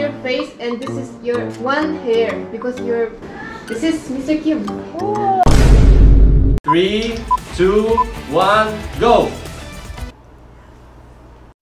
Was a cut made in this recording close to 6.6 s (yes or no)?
yes